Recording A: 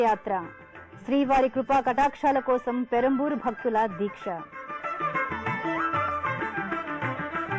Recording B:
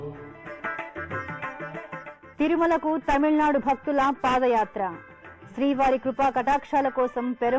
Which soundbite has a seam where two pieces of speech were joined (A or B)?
B